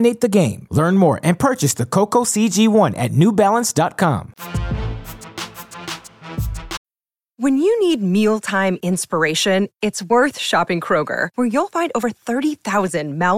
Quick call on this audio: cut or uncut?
uncut